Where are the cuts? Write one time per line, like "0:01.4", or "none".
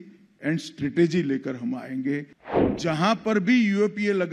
0:02.4

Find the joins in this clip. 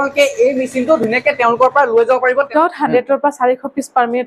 0:02.5

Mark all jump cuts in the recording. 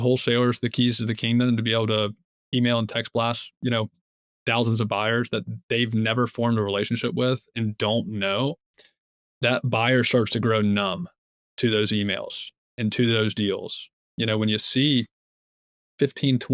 none

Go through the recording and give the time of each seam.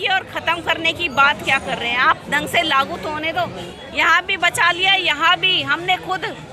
0:03.6

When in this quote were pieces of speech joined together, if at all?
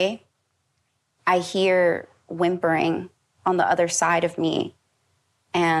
none

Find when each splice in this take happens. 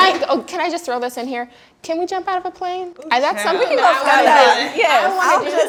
none

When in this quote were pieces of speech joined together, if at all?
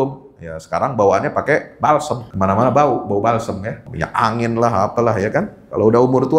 0:02.2
0:03.9

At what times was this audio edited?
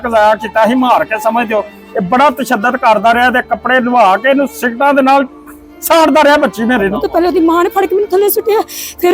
0:07.2

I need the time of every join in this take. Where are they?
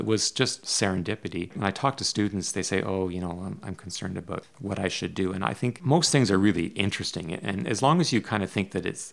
none

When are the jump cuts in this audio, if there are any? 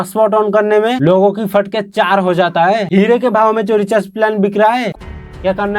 0:02.9
0:04.9

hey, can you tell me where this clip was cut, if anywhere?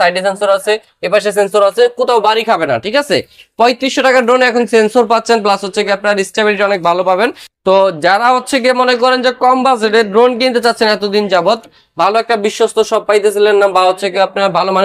none

